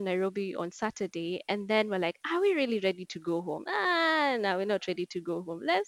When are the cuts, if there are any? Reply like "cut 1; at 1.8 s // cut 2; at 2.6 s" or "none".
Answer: none